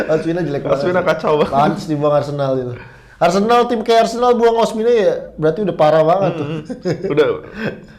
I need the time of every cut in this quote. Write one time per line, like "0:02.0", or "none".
none